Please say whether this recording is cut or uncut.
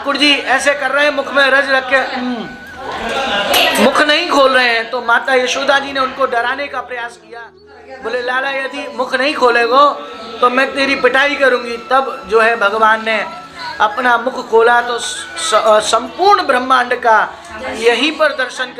uncut